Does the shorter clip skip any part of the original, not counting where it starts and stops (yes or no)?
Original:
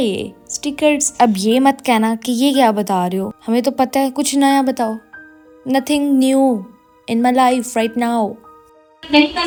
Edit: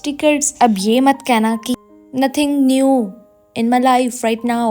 yes